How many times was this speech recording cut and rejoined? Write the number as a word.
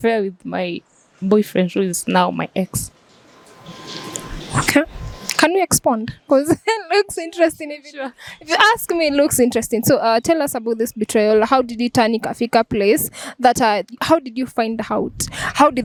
zero